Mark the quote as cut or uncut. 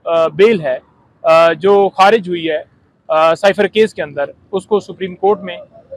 uncut